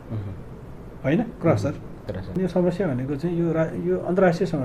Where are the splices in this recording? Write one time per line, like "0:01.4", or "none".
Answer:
0:02.4